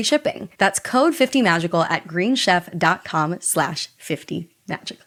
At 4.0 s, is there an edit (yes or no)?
no